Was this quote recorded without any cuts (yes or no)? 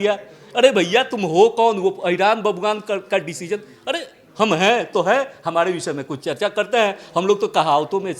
yes